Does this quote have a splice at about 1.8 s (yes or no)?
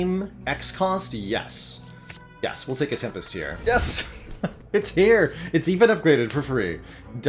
no